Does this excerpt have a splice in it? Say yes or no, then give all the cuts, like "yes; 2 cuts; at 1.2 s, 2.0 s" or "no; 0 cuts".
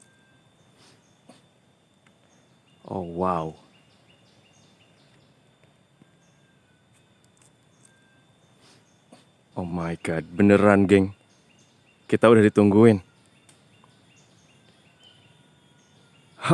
yes; 2 cuts; at 2.4 s, 9.5 s